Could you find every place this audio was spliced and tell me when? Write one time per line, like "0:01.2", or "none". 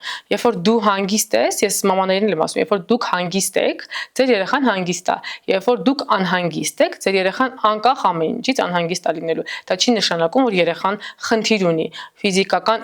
none